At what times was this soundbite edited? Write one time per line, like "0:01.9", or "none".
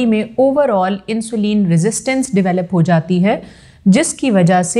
none